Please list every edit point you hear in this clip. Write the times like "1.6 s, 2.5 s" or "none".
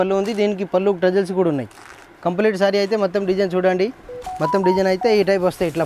none